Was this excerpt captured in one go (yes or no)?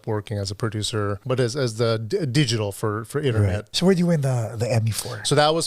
no